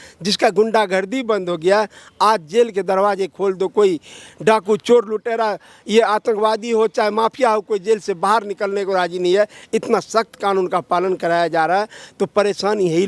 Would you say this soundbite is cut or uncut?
uncut